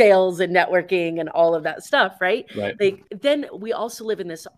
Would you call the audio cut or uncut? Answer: cut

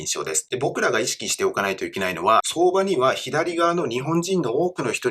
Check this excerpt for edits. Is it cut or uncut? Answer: cut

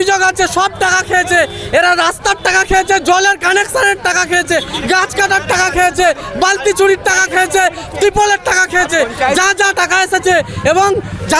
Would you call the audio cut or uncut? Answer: uncut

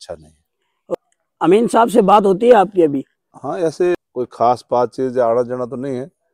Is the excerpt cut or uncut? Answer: cut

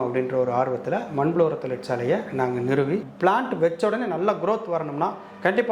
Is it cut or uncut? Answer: cut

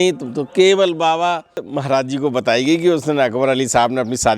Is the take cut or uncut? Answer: cut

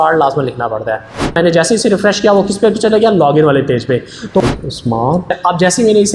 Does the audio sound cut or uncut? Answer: cut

